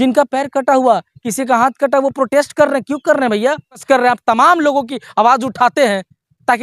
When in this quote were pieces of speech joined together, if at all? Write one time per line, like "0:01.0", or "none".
0:03.8